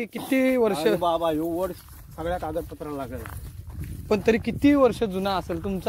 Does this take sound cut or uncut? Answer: uncut